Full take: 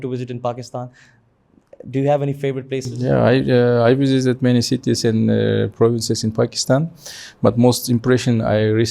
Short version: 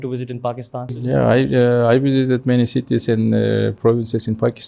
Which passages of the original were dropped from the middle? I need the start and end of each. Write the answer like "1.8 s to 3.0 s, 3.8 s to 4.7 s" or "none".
0.9 s to 2.9 s